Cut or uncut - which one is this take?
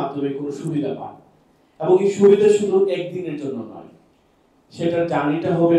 uncut